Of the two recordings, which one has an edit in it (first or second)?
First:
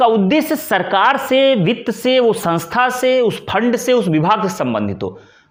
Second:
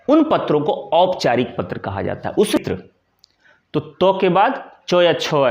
second